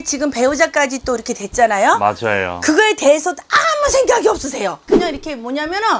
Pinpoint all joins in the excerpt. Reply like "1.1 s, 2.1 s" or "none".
4.9 s